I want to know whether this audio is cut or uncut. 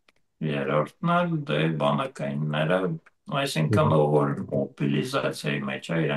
uncut